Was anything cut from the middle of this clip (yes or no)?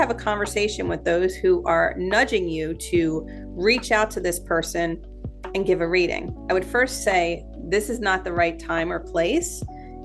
no